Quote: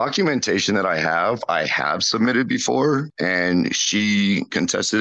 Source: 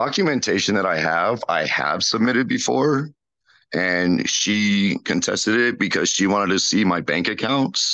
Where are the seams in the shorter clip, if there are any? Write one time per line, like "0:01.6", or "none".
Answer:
0:03.1

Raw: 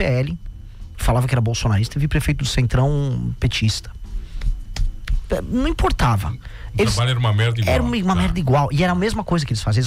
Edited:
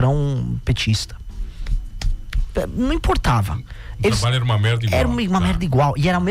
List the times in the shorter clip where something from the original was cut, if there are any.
none

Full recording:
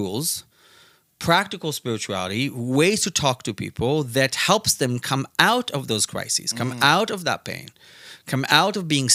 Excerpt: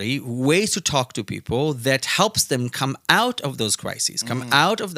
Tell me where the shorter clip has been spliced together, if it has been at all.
none

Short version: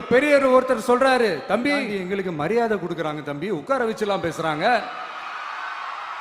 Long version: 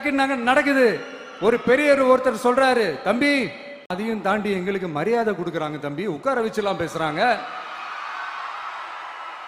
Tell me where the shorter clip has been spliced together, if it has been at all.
0:01.9

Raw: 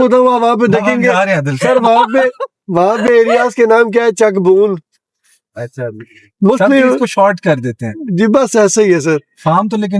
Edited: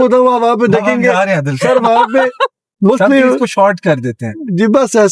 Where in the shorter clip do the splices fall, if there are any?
0:02.6

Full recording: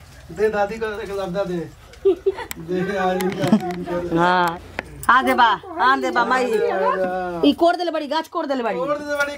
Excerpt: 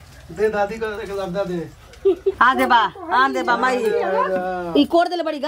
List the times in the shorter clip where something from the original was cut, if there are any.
0:02.4

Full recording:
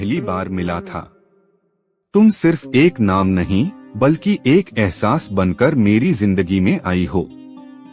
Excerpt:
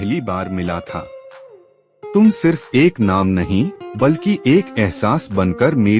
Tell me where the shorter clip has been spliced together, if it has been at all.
none

